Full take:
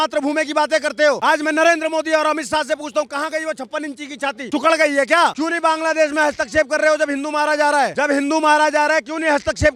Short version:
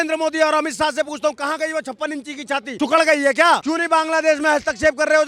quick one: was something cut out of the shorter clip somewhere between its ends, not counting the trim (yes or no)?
no